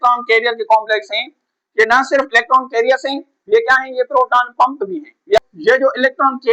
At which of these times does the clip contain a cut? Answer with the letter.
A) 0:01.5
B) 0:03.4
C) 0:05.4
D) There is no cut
C